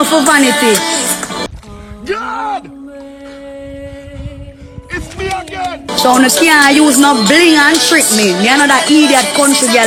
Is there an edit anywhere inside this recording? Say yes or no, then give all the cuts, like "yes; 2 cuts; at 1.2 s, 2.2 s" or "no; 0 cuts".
no; 0 cuts